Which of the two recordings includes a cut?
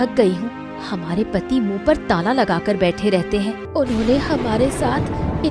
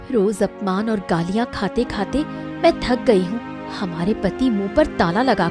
first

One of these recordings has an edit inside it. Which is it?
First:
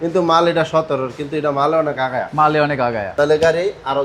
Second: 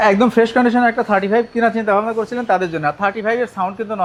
first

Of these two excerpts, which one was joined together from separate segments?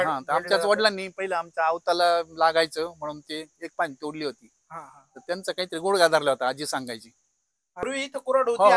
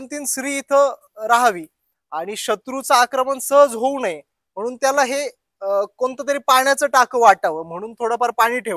first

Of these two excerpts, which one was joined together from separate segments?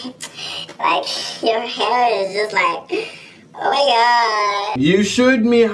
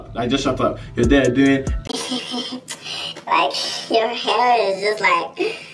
first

